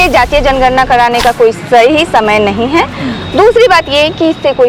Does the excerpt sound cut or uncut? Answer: uncut